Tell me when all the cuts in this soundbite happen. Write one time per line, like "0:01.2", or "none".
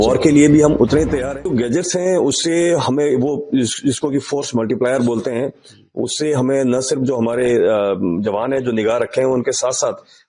0:01.2